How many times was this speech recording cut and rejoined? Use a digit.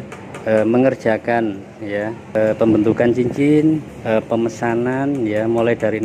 2